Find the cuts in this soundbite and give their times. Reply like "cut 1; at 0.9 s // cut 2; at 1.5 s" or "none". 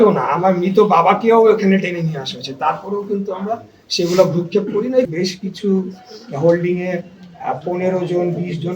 cut 1; at 5.1 s